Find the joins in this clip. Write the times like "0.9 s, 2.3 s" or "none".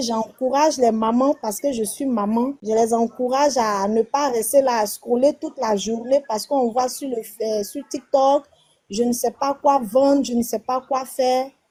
none

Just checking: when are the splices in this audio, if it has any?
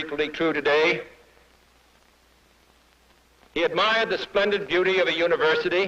1.7 s

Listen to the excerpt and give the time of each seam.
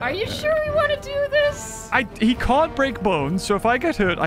1.7 s

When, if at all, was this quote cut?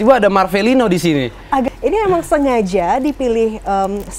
1.7 s

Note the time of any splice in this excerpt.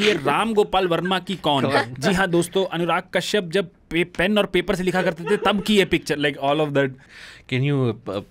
7.1 s

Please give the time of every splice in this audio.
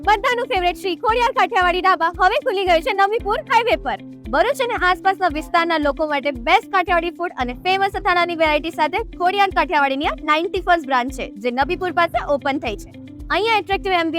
none

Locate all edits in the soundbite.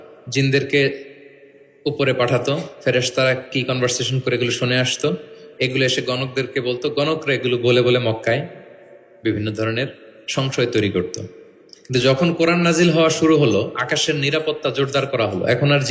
none

